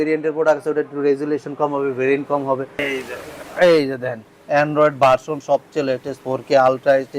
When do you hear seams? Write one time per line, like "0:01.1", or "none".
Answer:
0:02.8